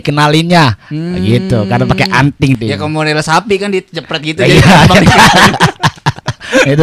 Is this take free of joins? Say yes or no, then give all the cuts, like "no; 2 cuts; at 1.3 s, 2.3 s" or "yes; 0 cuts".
no; 1 cut; at 2.6 s